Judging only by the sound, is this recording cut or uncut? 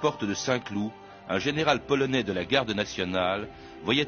cut